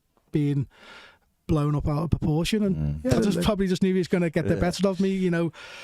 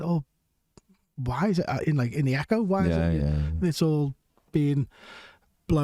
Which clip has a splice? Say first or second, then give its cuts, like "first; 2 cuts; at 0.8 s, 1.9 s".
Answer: first; 1 cut; at 3.3 s